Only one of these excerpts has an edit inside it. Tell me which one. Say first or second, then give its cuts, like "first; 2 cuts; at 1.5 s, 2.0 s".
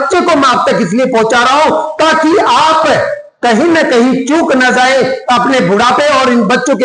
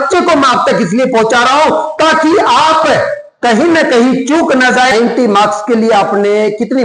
second; 1 cut; at 4.9 s